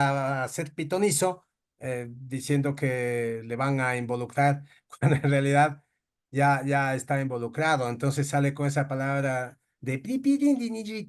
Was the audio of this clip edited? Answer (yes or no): no